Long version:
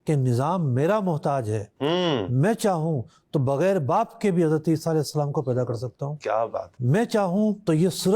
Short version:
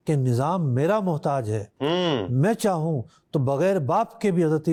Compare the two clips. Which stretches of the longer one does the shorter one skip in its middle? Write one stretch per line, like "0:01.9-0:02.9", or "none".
none